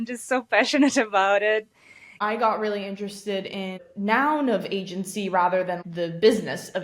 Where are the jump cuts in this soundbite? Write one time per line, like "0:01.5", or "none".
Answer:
0:02.1
0:03.8
0:05.8